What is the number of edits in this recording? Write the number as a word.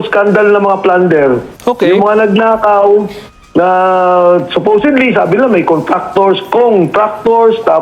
zero